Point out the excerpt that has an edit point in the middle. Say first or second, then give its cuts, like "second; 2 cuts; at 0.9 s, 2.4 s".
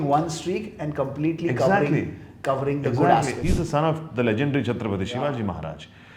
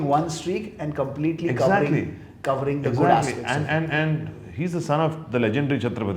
first; 1 cut; at 3.4 s